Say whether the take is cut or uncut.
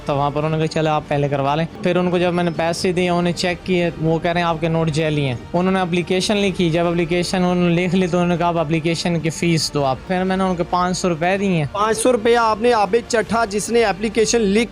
cut